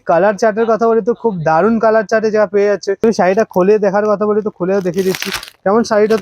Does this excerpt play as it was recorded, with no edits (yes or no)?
no